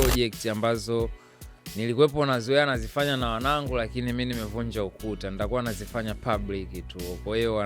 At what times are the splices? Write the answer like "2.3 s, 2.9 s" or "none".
none